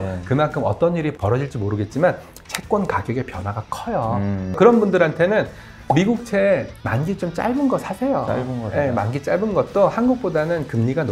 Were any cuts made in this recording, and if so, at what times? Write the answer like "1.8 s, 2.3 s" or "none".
1.1 s, 4.6 s